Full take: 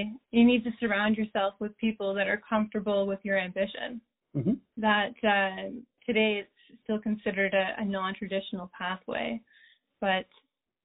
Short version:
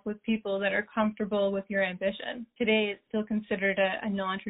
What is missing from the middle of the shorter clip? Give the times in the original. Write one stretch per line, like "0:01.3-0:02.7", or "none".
0:04.0-0:05.9
0:06.5-0:06.8